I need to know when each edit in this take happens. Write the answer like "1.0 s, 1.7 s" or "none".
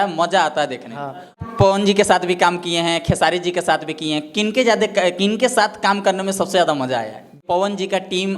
1.4 s, 7.4 s